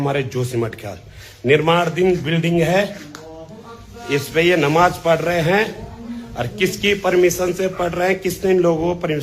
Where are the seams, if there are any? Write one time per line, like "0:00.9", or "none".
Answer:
none